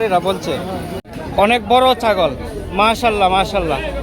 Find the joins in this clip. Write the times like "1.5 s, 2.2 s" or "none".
1.0 s